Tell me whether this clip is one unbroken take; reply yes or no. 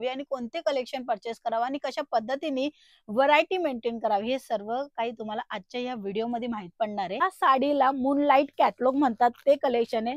no